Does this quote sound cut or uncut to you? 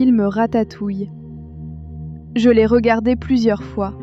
cut